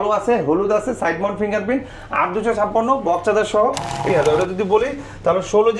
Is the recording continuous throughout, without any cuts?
no; 1 cut; at 4.1 s

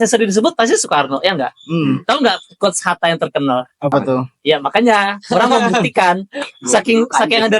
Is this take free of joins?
yes; 0 cuts

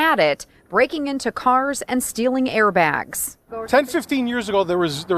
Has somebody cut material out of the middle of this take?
yes; 1 cut; at 3.1 s

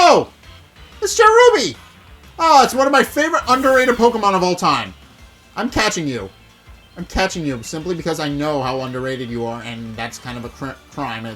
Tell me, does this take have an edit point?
no; 0 cuts

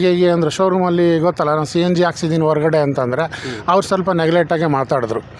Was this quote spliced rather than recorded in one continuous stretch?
no; 0 cuts

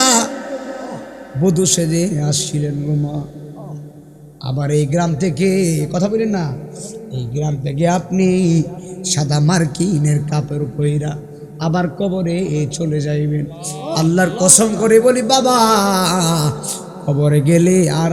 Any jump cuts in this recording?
no; 0 cuts

